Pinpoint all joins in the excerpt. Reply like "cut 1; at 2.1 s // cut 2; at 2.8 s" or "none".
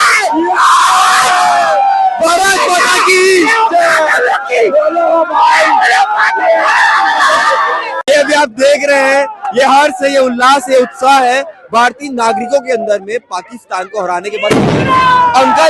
none